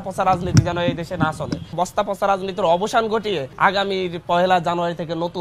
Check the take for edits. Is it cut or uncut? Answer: cut